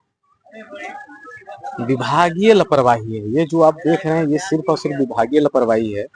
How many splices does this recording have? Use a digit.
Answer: 0